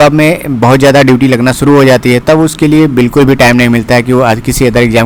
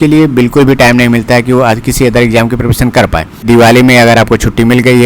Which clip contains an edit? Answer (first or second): second